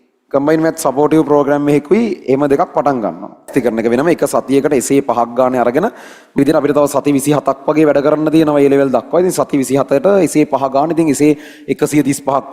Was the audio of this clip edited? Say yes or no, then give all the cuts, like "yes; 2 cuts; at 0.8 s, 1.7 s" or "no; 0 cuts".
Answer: yes; 2 cuts; at 3.5 s, 6.4 s